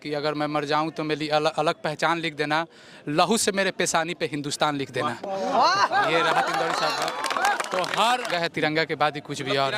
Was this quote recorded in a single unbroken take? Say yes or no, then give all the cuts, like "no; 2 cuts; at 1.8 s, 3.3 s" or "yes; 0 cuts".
no; 1 cut; at 8.3 s